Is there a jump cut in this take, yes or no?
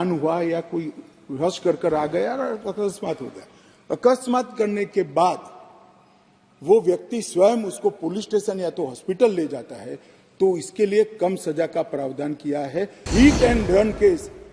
yes